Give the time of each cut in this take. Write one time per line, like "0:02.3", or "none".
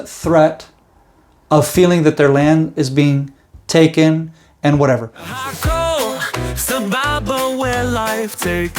0:05.3